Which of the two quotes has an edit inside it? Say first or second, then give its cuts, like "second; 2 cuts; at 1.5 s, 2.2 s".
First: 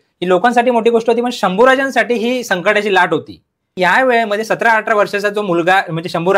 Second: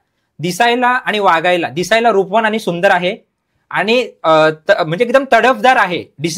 first; 1 cut; at 3.7 s